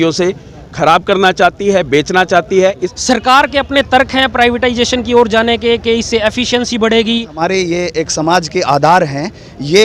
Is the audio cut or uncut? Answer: cut